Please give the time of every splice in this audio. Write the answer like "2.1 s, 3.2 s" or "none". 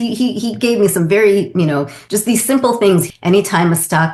3.1 s